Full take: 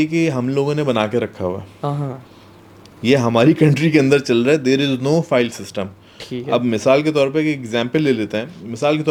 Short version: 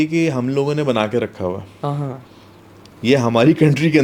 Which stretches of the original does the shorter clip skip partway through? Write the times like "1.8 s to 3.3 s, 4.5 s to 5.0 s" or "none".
none